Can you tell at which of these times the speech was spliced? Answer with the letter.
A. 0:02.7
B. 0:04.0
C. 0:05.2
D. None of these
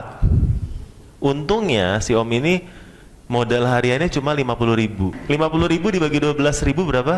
C